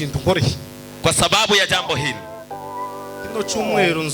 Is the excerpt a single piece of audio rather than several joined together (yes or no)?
yes